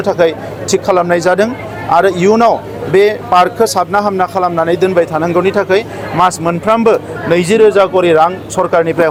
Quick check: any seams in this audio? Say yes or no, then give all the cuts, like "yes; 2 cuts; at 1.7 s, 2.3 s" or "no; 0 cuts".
no; 0 cuts